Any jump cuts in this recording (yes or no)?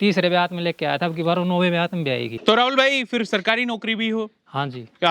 yes